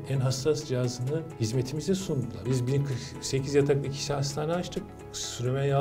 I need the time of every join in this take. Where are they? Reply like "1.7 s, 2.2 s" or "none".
1.3 s, 2.4 s